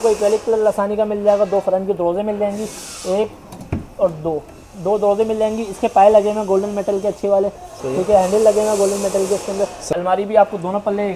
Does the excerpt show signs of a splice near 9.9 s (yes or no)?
yes